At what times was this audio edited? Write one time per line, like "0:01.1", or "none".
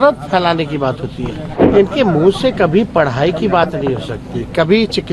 0:01.6